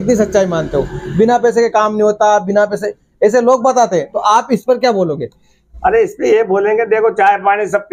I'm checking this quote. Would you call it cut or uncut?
uncut